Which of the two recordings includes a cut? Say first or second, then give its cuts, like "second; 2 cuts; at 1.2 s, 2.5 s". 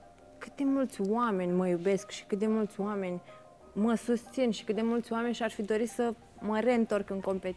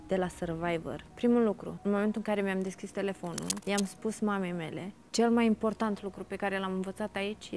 second; 4 cuts; at 1.1 s, 1.7 s, 3.5 s, 5.1 s